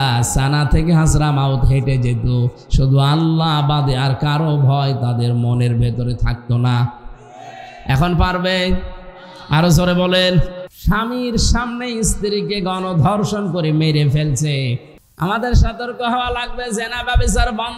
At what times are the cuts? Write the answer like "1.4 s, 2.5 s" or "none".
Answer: 10.6 s, 14.9 s